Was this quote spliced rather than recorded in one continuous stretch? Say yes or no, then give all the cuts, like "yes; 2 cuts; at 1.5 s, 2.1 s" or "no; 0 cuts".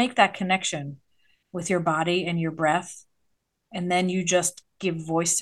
no; 0 cuts